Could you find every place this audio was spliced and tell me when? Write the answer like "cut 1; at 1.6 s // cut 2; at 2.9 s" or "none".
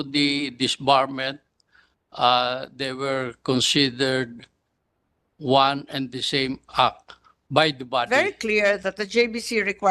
cut 1; at 8.1 s